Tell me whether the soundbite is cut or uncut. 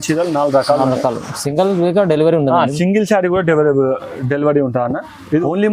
uncut